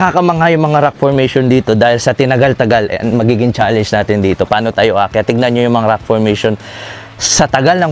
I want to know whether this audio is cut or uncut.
uncut